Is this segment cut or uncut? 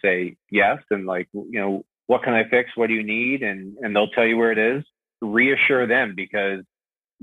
cut